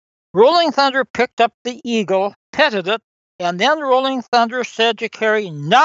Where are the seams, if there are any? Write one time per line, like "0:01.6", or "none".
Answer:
0:02.4
0:03.1